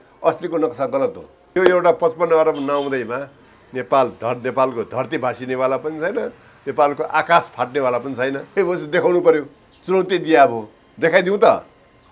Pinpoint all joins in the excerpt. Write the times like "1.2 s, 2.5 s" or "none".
1.5 s, 8.4 s